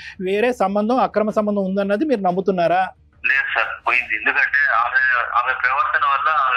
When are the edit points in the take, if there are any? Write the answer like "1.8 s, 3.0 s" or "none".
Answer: 3.1 s